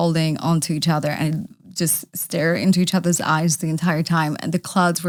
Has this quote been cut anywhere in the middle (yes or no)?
no